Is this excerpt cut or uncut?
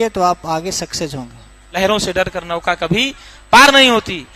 cut